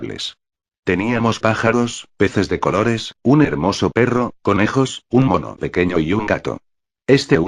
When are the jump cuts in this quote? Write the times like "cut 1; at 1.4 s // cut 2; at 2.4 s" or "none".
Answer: cut 1; at 5.3 s